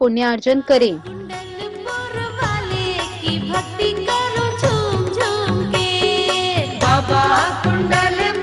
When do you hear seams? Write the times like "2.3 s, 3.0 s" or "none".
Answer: 6.7 s